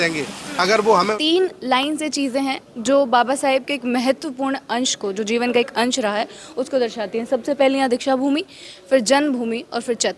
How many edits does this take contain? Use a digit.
1